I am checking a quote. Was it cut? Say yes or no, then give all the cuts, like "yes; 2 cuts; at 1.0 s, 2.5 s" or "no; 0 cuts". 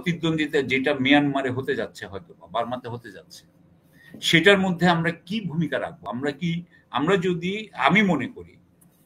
no; 0 cuts